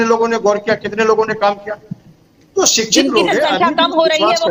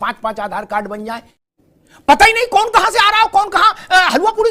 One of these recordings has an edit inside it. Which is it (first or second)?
second